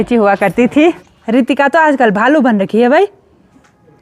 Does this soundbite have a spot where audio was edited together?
yes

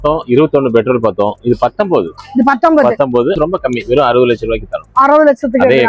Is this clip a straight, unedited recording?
no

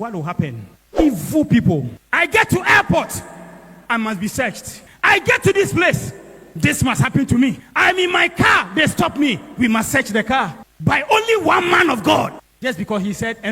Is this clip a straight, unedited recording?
no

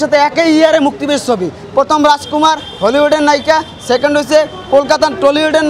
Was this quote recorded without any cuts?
yes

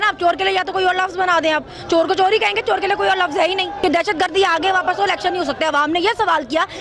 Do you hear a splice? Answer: yes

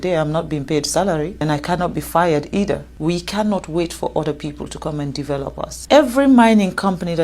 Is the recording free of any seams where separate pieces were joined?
no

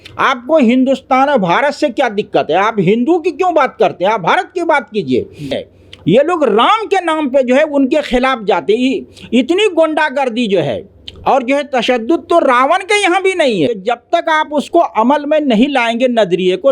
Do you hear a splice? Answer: yes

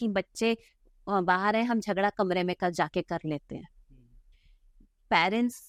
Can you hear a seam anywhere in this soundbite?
no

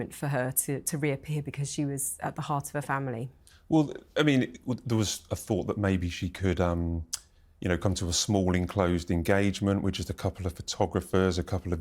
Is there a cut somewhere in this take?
no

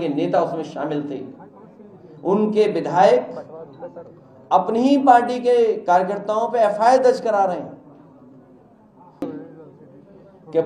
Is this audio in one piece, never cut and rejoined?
yes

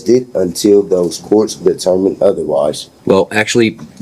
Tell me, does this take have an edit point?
yes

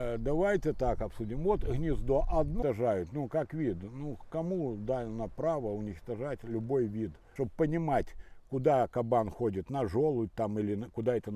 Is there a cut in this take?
yes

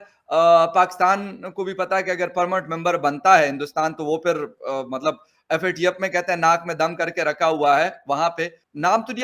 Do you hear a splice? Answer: no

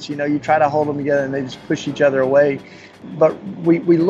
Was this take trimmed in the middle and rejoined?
yes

